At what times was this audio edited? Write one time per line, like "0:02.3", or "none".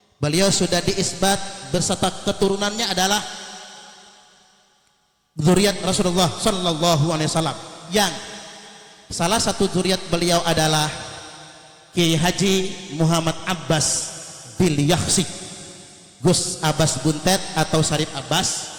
none